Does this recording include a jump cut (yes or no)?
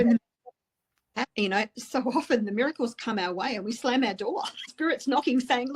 yes